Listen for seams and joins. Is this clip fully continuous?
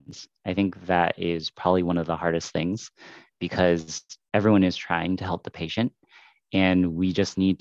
yes; 0 cuts

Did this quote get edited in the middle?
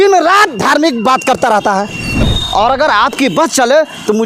yes; 1 cut; at 2.3 s

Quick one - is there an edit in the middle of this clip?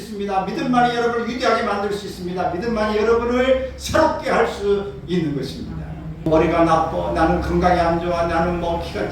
yes; 1 cut; at 6.3 s

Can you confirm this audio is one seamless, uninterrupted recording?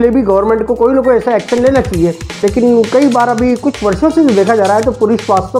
no; 1 cut; at 2.4 s

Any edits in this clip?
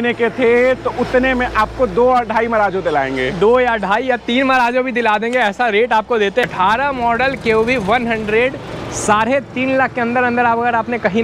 yes; 1 cut; at 6.5 s

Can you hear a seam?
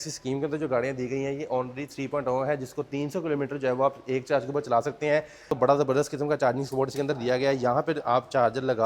yes; 1 cut; at 5.5 s

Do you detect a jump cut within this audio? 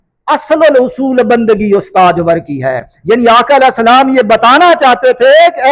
no; 0 cuts

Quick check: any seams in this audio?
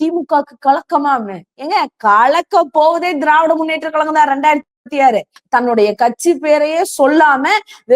yes; 1 cut; at 5.3 s

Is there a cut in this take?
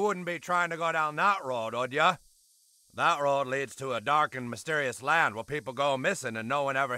yes; 1 cut; at 1.4 s

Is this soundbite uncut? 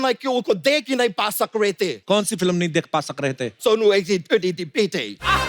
no; 2 cuts; at 2.0 s, 3.5 s

